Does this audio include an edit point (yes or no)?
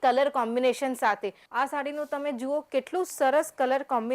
yes